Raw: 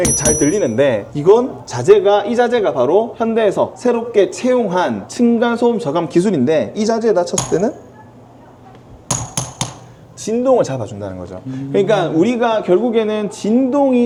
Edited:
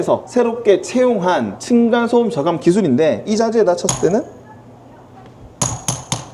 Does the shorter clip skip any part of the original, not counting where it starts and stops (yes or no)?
no